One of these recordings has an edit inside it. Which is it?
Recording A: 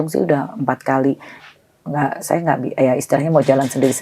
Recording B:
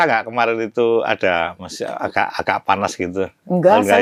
A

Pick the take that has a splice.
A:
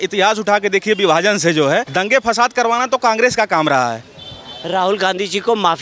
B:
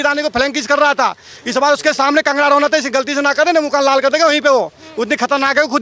A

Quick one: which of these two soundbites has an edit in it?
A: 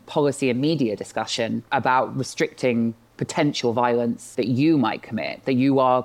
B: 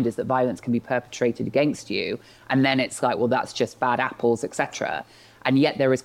A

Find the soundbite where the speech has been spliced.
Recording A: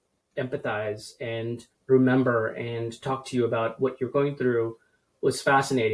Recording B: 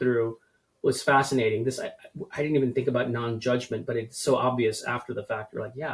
A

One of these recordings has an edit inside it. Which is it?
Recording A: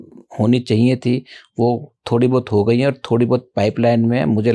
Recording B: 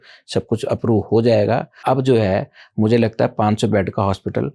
B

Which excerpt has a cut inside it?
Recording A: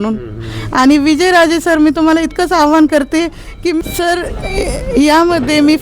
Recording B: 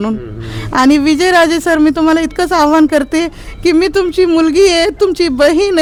A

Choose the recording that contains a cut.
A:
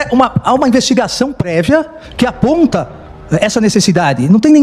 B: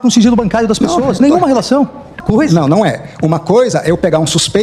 B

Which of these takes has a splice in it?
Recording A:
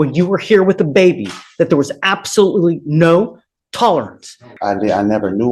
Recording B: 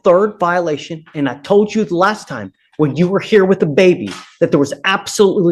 A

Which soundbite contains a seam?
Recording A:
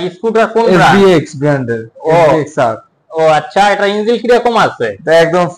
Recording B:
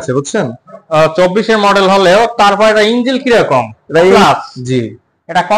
B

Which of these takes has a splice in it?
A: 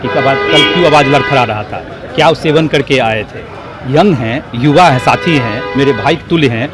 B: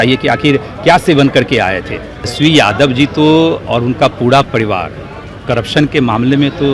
B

